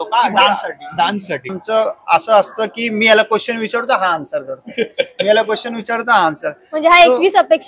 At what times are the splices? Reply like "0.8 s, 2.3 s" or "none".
1.5 s